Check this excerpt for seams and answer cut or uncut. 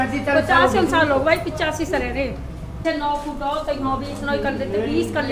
cut